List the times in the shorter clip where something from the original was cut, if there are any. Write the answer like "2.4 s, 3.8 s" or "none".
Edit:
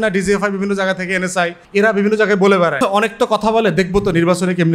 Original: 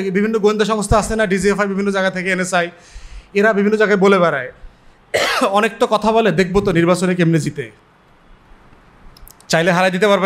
1.6 s, 2.8 s